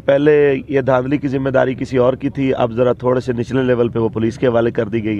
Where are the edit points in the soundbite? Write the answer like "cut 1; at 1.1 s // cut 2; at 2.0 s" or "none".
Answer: none

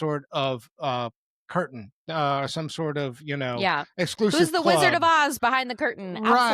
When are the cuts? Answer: none

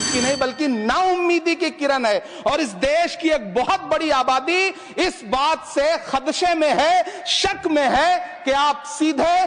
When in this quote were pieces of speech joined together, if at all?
none

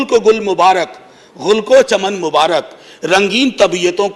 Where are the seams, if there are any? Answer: none

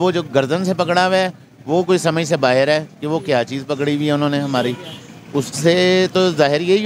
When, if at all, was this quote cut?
none

